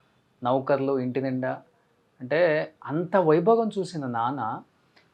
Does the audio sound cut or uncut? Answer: uncut